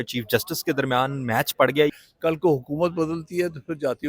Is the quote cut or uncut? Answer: cut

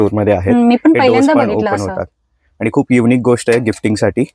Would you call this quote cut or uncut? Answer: uncut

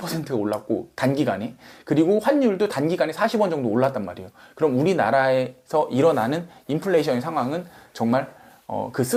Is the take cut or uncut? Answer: uncut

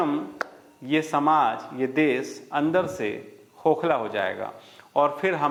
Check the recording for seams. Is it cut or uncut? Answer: uncut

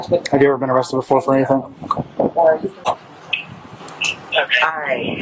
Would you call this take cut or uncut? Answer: uncut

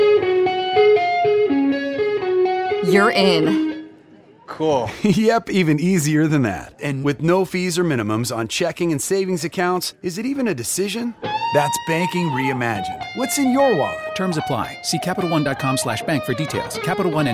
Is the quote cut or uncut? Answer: uncut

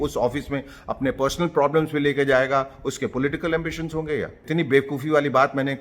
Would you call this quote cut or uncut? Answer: cut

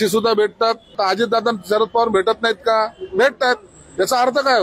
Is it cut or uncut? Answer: cut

